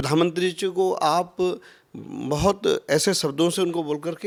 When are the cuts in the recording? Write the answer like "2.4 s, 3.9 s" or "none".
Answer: none